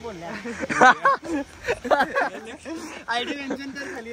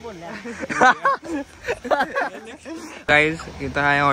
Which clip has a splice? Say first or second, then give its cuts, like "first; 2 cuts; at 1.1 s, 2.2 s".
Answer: second; 1 cut; at 3.0 s